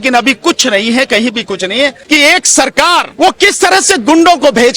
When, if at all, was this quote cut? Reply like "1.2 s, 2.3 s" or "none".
2.0 s, 3.1 s